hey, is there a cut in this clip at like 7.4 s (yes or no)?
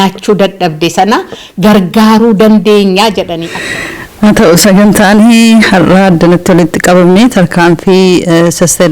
no